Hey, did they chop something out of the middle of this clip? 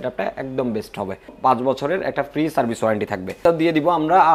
yes; 2 cuts; at 1.3 s, 3.4 s

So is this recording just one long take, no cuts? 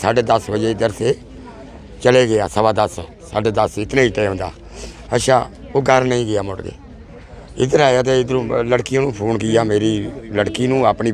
yes; 0 cuts

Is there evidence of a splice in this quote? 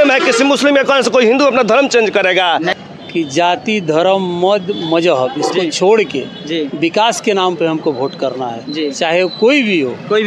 yes; 1 cut; at 2.7 s

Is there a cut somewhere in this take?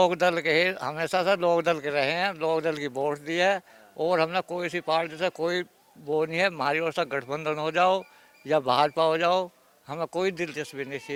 no; 0 cuts

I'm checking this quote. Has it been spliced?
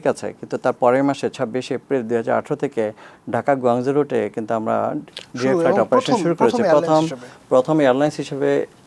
no; 0 cuts

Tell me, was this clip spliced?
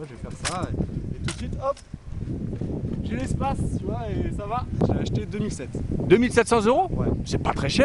no; 0 cuts

